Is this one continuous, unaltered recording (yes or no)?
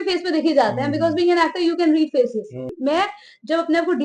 no